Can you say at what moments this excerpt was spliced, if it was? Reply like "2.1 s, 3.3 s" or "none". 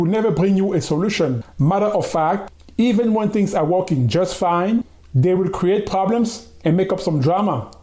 none